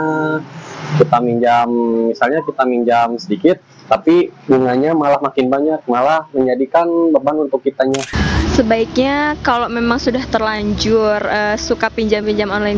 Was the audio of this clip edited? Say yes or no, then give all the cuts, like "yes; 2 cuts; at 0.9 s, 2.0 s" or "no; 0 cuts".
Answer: yes; 1 cut; at 8.1 s